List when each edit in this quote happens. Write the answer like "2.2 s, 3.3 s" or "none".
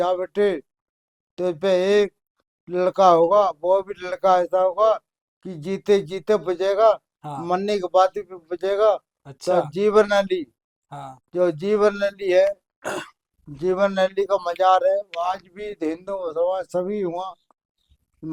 none